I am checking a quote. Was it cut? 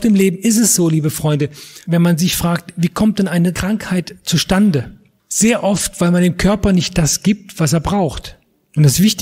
no; 0 cuts

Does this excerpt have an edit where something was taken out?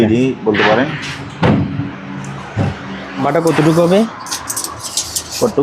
yes; 1 cut; at 3.2 s

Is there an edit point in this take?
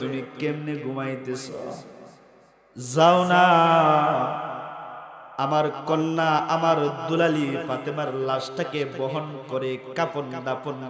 no; 0 cuts

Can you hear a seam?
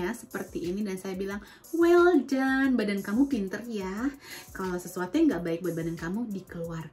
no; 0 cuts

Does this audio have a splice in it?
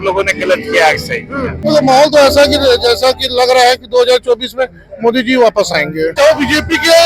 yes; 2 cuts; at 1.6 s, 6.1 s

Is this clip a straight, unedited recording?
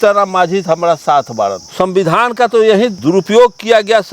no; 2 cuts; at 1.6 s, 3.0 s

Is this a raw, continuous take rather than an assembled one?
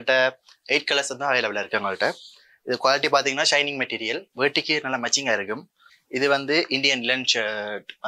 yes; 0 cuts

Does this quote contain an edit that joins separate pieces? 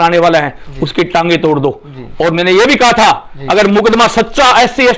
no; 0 cuts

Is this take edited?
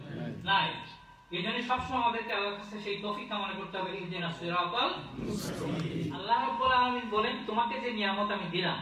yes; 1 cut; at 6.2 s

